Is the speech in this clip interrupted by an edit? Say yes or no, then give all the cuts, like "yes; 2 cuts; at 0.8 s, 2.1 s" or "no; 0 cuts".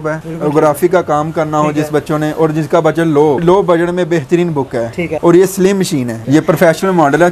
yes; 3 cuts; at 3.4 s, 5.2 s, 6.2 s